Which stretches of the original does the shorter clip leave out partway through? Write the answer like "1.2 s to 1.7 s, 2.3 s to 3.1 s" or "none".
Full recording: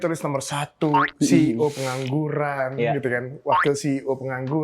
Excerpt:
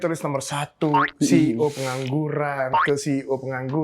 2.7 s to 3.5 s